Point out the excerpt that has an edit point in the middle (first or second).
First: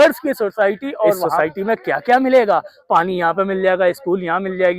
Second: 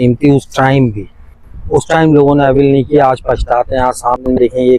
first